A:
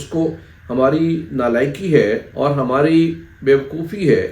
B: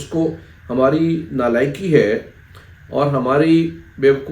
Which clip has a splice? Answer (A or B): A